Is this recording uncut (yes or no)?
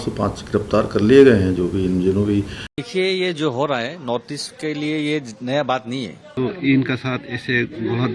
no